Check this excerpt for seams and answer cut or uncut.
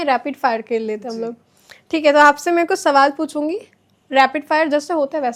uncut